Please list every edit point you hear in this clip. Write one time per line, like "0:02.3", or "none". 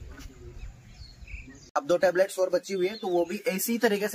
0:01.3